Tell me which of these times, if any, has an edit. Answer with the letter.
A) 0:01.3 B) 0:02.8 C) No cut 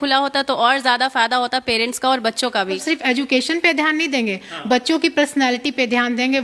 B